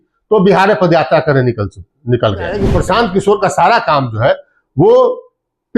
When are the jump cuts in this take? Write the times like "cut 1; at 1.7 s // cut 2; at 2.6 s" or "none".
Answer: cut 1; at 2.7 s